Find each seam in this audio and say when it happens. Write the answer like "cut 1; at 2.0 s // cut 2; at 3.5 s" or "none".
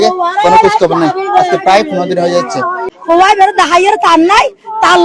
cut 1; at 2.9 s